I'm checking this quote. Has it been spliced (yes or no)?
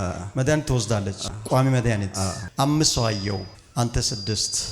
yes